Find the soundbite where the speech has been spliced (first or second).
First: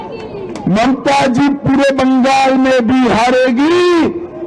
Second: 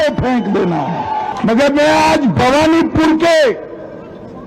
second